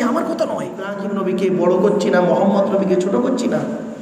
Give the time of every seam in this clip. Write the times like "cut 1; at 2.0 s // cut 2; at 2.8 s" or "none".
cut 1; at 1.0 s